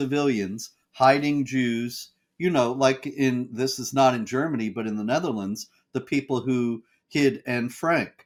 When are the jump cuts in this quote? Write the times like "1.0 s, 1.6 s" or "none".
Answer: none